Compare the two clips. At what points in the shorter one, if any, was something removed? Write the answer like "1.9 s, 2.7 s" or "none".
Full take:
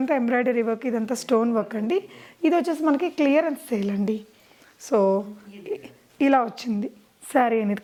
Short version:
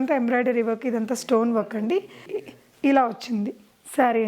2.2 s